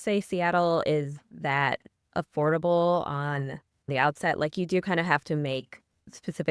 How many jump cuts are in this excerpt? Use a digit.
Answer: 0